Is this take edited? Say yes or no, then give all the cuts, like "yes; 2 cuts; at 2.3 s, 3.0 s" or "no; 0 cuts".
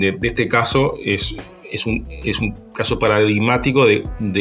no; 0 cuts